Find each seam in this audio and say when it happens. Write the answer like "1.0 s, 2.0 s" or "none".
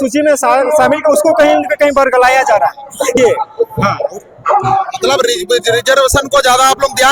3.2 s